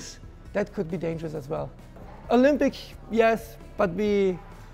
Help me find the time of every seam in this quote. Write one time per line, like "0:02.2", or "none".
none